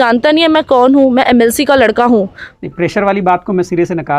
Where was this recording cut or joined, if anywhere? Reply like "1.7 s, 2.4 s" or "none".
2.4 s